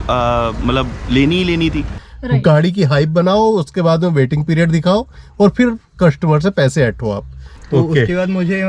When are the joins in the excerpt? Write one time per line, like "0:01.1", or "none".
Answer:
0:02.0
0:07.5